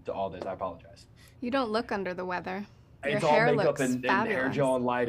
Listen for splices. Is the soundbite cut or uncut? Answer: uncut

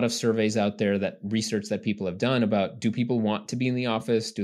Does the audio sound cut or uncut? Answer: uncut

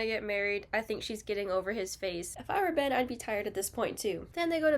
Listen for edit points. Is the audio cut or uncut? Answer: cut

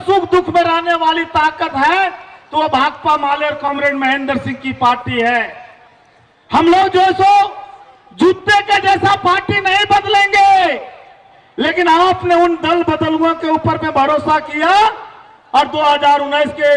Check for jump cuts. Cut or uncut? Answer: uncut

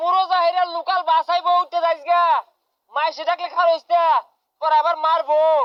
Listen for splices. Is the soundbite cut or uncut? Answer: uncut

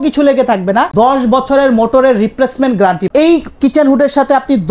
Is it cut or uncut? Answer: cut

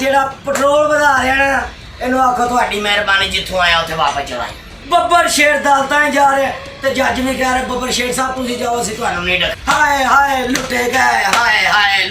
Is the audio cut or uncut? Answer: cut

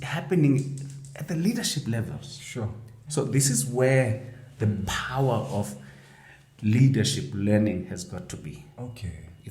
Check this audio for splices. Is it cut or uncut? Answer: cut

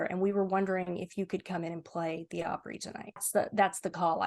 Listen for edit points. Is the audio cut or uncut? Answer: cut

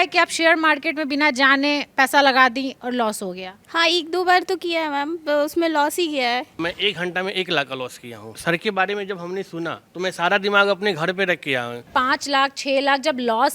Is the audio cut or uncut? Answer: cut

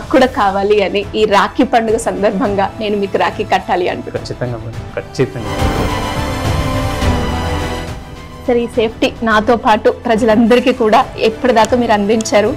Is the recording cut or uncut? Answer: uncut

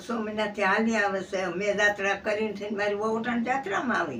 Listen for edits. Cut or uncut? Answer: uncut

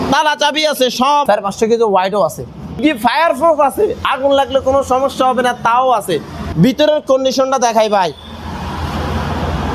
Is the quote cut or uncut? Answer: cut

